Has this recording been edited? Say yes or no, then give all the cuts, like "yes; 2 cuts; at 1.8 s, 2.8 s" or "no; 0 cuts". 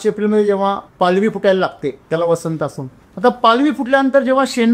yes; 2 cuts; at 0.9 s, 2.0 s